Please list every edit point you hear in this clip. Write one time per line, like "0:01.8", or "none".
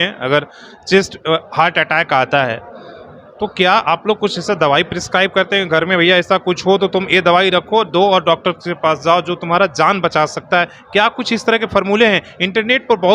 none